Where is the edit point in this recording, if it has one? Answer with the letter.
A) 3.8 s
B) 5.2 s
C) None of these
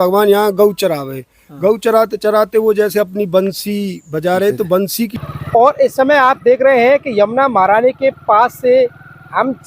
B